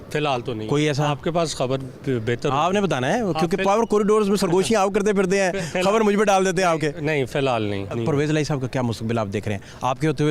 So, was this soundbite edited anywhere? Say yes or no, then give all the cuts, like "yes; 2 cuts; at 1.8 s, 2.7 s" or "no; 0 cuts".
yes; 1 cut; at 7.9 s